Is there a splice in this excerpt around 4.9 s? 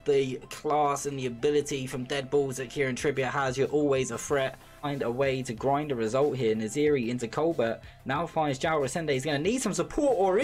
yes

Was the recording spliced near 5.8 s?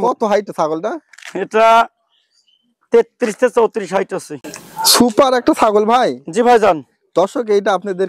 no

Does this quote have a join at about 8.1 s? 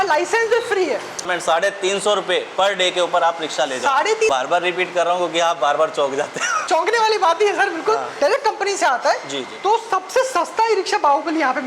yes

